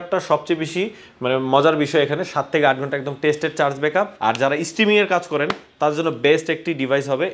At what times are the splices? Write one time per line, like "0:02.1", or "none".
0:04.1